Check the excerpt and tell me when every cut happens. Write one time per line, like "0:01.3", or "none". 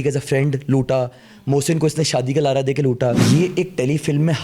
0:03.2